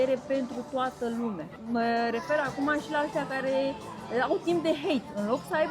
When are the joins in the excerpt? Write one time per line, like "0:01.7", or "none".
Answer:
0:01.5